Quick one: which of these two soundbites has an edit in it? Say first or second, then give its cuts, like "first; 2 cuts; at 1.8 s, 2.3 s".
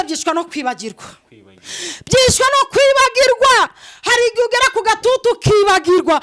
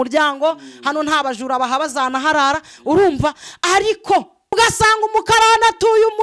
second; 1 cut; at 4.5 s